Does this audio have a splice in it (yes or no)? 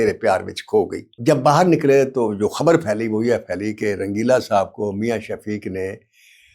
yes